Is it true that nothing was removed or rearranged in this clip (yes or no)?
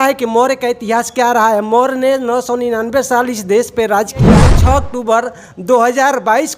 no